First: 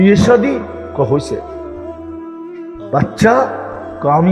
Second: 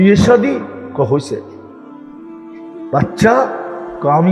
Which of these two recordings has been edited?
first; 2 cuts; at 1.4 s, 2.9 s

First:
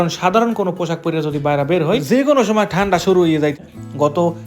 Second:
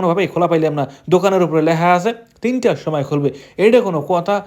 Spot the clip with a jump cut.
first; 1 cut; at 3.6 s

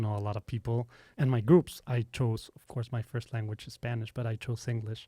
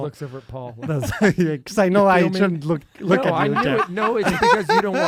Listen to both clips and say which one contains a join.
first; 1 cut; at 1.0 s

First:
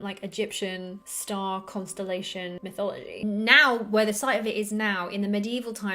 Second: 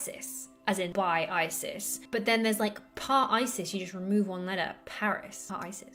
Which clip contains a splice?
first; 1 cut; at 3.1 s

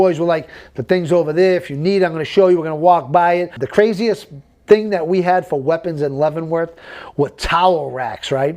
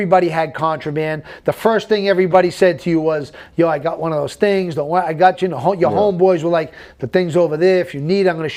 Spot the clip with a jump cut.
first; 1 cut; at 3.5 s

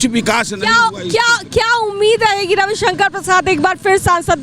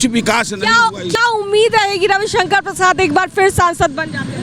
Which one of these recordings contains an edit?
second; 1 cut; at 1.2 s

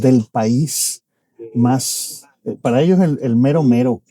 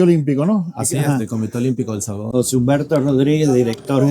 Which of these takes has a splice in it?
second; 1 cut; at 2.2 s

